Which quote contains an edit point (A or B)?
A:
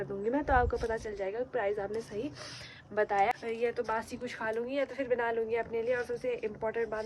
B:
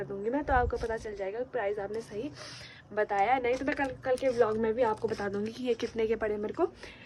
A